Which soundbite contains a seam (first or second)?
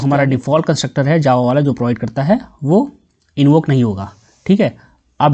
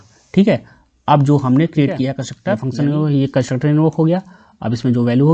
second